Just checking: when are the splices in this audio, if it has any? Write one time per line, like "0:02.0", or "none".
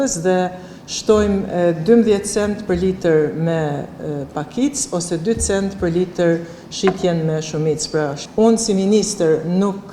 0:08.3